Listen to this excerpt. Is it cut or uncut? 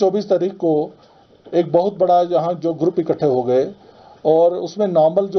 uncut